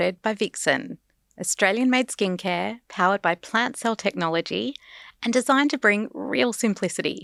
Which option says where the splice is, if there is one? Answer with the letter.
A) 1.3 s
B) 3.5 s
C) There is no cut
C